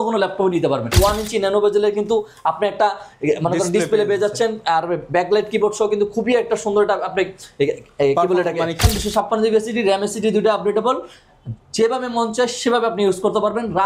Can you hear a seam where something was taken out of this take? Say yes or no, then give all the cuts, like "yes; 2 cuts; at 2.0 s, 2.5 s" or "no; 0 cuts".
yes; 2 cuts; at 0.9 s, 8.8 s